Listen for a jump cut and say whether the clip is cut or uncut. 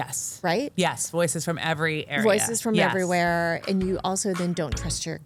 uncut